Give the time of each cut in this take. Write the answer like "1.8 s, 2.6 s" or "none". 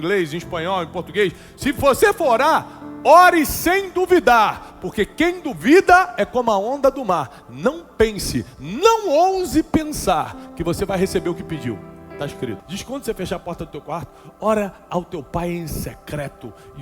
12.6 s